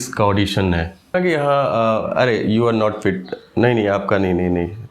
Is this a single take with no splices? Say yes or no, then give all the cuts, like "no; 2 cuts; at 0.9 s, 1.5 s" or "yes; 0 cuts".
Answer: no; 1 cut; at 1.1 s